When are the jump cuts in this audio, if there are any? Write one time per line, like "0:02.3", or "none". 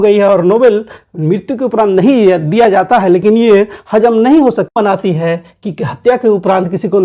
0:04.8